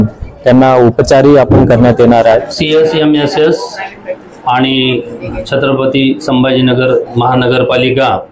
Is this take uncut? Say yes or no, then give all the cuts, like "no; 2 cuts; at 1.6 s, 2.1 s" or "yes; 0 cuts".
no; 1 cut; at 2.5 s